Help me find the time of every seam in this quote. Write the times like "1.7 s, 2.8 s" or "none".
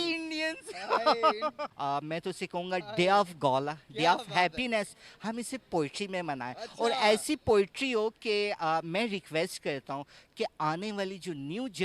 1.7 s